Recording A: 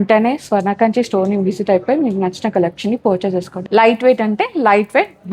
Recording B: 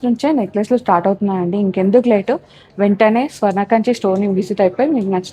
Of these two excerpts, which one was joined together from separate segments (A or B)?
A